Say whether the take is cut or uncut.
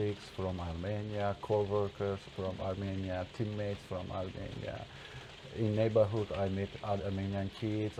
uncut